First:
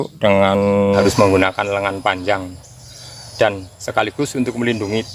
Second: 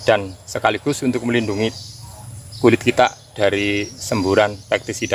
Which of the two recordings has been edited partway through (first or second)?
first